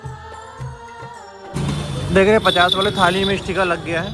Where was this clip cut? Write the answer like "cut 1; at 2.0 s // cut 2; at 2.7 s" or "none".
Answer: cut 1; at 1.6 s

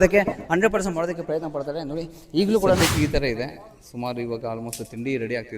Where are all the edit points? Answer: cut 1; at 2.8 s

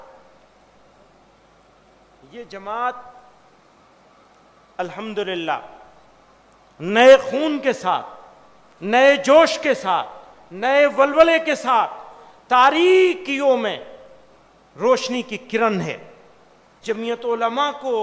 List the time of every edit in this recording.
cut 1; at 16.8 s

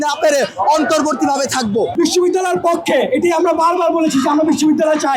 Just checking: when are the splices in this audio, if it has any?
cut 1; at 1.9 s

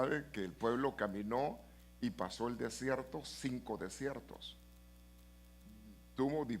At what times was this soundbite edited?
cut 1; at 1.3 s

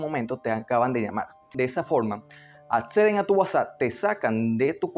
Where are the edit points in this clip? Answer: cut 1; at 1.5 s

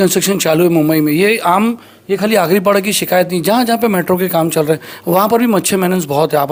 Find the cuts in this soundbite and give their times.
none

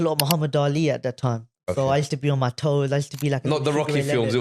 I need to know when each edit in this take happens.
none

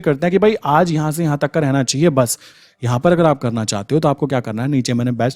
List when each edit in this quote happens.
cut 1; at 2.5 s

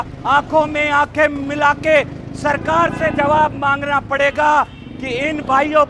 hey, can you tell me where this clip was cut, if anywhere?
none

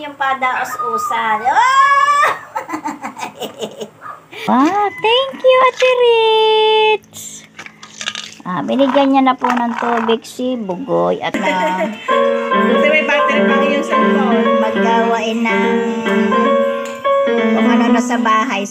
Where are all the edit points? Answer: cut 1; at 4.5 s // cut 2; at 11.4 s

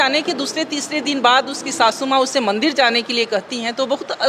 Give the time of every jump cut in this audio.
none

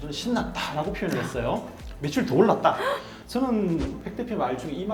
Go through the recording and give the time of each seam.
cut 1; at 3.1 s

